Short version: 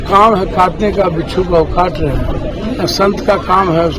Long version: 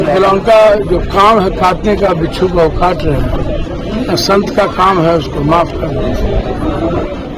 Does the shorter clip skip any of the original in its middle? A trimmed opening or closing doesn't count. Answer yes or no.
yes